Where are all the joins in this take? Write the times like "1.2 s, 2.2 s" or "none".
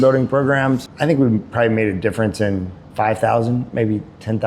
0.9 s, 2.8 s